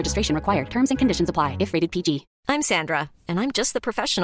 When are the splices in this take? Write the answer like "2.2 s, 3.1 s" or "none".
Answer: 2.3 s